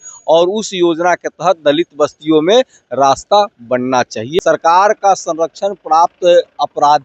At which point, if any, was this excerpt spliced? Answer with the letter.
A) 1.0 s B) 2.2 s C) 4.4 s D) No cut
C